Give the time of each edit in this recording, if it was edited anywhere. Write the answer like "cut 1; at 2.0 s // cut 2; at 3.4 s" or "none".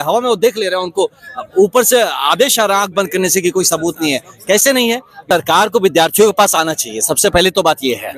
cut 1; at 5.3 s